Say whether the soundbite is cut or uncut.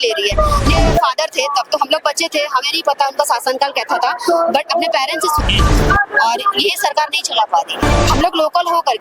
cut